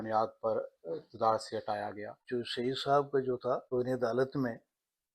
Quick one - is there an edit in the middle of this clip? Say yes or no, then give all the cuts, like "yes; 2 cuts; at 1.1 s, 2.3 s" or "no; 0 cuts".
yes; 2 cuts; at 2.1 s, 3.6 s